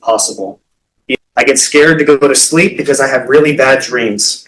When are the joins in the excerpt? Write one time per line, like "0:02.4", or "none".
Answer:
0:01.1